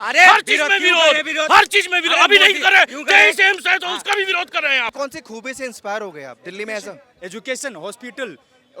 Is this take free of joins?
no; 1 cut; at 4.9 s

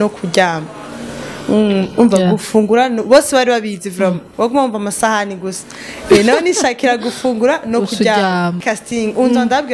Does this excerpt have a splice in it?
yes; 1 cut; at 8.6 s

